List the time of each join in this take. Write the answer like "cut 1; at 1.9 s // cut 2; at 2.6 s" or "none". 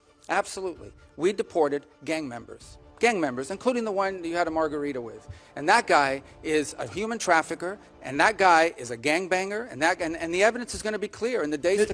none